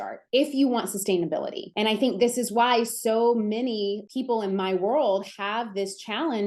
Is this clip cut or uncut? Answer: uncut